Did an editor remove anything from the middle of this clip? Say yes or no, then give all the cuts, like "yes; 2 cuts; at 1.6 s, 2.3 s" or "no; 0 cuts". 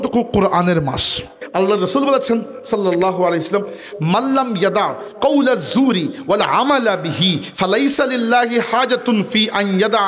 yes; 1 cut; at 1.4 s